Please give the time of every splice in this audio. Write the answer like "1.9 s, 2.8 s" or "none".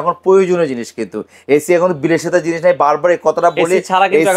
none